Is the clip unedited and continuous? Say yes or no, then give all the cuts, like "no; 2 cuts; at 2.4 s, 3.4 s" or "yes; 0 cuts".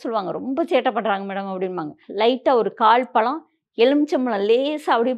no; 1 cut; at 2.0 s